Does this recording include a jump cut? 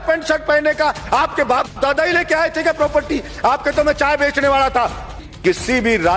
yes; 1 cut; at 5.2 s

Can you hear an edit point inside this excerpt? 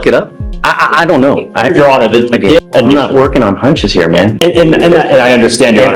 yes; 1 cut; at 2.6 s

